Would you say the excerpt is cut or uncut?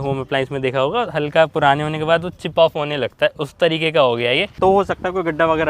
cut